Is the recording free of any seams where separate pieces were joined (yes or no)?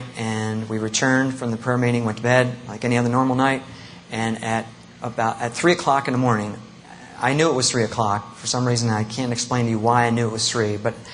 no